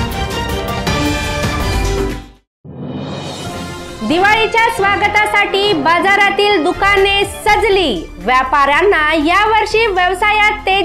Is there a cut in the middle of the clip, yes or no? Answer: yes